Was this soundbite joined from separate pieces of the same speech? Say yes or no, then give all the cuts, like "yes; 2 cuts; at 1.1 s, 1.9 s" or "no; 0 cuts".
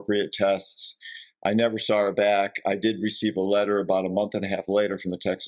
no; 0 cuts